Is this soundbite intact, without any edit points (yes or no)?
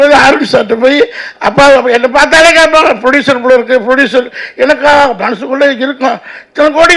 yes